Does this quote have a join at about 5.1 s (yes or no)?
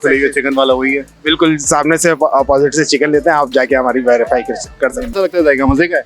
yes